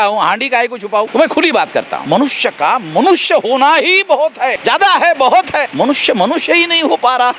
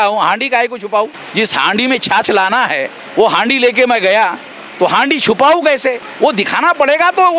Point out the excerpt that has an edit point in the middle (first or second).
first